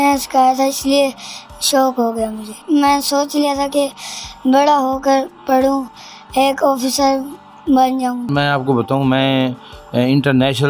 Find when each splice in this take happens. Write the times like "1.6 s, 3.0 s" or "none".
2.5 s, 8.3 s